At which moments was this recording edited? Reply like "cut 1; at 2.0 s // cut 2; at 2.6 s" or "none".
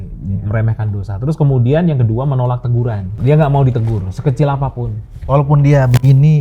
cut 1; at 3.1 s